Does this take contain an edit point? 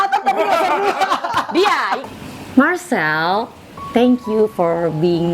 yes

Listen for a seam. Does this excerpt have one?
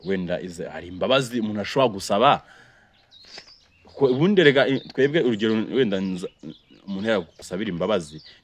yes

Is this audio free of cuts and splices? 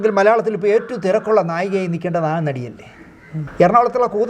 no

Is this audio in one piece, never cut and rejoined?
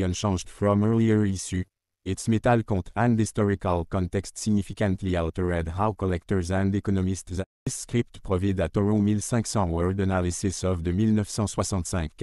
no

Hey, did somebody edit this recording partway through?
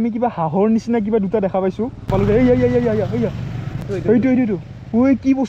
yes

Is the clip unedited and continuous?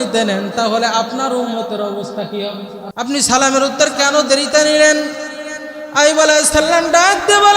no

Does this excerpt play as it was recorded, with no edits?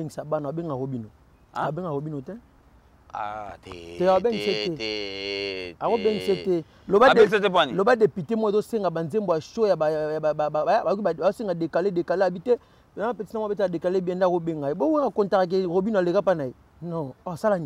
yes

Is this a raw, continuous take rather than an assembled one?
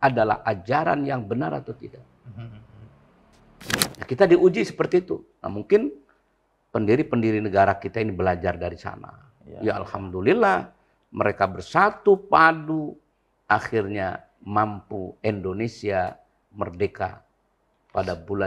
no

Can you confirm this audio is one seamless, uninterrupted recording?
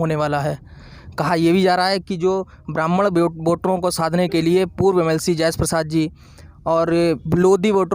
yes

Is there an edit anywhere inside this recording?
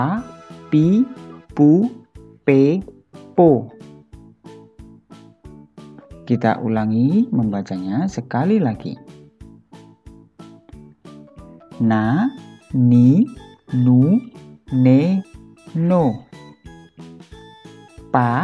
no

